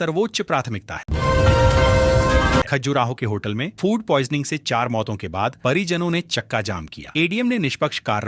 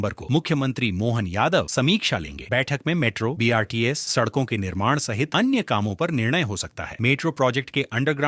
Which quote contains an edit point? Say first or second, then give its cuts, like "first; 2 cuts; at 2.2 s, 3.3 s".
first; 2 cuts; at 1.0 s, 2.7 s